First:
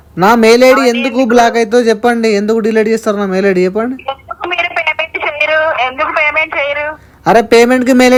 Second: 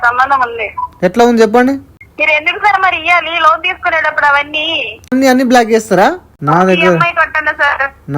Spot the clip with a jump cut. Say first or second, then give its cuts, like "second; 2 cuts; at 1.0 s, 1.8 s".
second; 2 cuts; at 5.2 s, 6.3 s